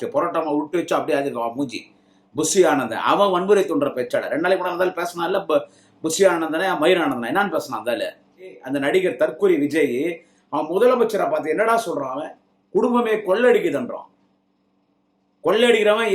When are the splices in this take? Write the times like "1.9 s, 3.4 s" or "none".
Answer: 8.6 s